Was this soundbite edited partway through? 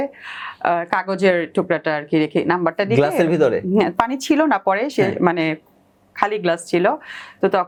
no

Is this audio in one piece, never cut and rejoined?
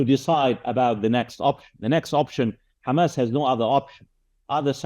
yes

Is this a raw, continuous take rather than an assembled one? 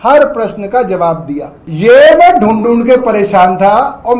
no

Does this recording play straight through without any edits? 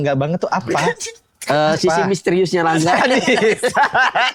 yes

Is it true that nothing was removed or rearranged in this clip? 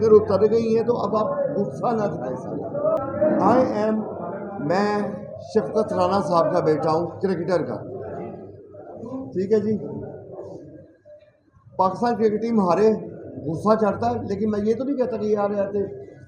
yes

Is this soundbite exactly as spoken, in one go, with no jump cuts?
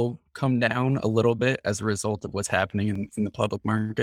no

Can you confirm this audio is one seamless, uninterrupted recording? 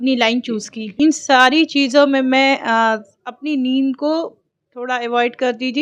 no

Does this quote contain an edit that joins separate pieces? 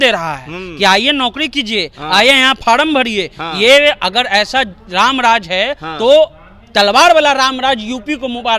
no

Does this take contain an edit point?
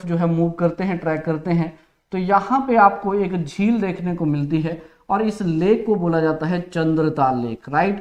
no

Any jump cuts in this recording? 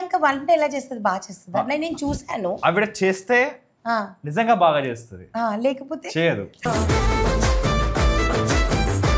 no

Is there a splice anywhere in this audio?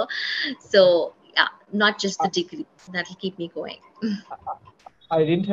no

